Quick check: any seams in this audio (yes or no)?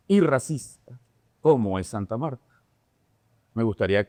no